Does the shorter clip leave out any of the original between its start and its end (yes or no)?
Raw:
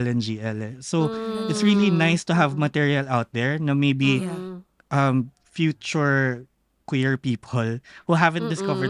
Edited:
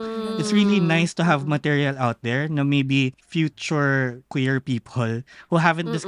yes